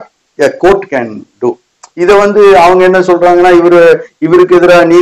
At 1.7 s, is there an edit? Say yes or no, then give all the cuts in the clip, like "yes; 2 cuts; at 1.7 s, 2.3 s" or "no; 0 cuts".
no; 0 cuts